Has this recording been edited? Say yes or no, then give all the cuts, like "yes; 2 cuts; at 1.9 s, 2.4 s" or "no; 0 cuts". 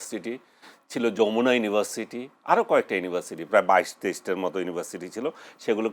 no; 0 cuts